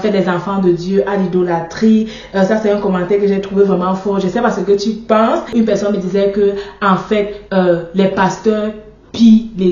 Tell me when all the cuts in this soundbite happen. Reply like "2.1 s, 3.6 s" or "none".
5.5 s